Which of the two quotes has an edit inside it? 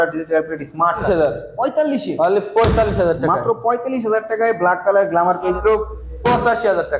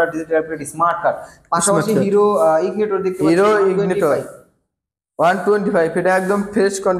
first; 2 cuts; at 1.0 s, 5.6 s

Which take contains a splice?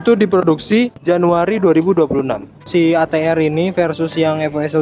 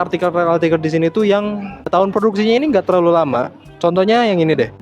first; 1 cut; at 2.6 s

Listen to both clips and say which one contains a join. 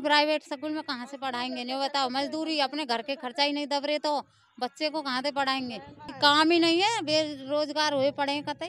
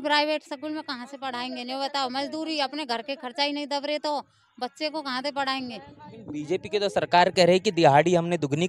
first; 1 cut; at 6.1 s

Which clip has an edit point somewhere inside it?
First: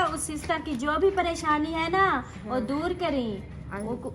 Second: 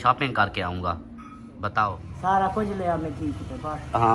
second; 1 cut; at 2.1 s

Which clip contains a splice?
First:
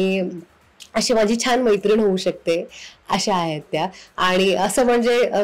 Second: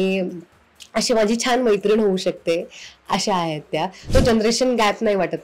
second; 1 cut; at 4.1 s

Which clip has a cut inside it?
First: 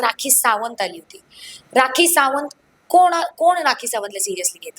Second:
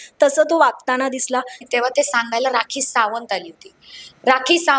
second; 1 cut; at 1.6 s

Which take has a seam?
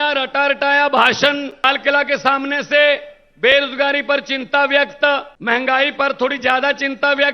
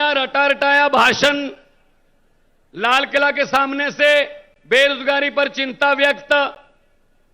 first; 2 cuts; at 1.6 s, 5.3 s

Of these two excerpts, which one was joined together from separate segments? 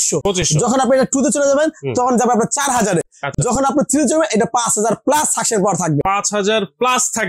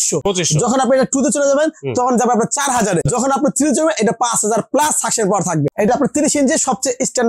second; 2 cuts; at 3.2 s, 5.9 s

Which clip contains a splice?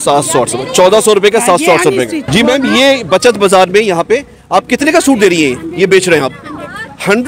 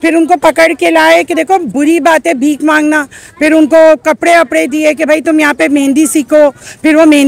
first; 1 cut; at 2.2 s

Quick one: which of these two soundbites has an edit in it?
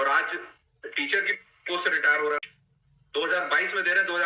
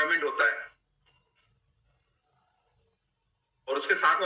first; 1 cut; at 2.4 s

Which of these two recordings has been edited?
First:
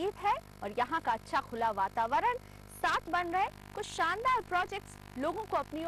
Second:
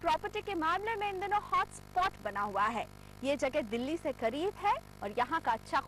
first; 1 cut; at 3.1 s

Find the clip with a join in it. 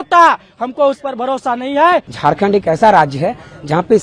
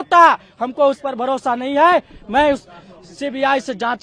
first; 1 cut; at 2.1 s

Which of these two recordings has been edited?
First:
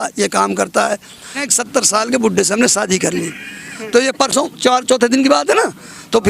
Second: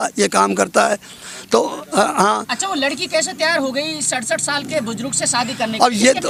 first; 1 cut; at 1.4 s

